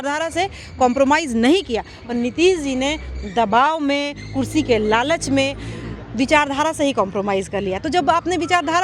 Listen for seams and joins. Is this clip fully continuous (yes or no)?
yes